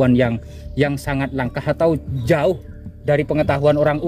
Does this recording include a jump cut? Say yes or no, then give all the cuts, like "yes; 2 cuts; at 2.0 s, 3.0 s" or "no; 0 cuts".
no; 0 cuts